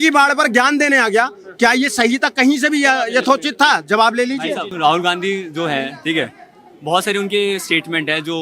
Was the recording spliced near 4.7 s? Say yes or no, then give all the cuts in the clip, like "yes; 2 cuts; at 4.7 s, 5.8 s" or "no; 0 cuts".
yes; 1 cut; at 4.7 s